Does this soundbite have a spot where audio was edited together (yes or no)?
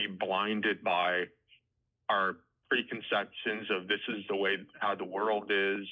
no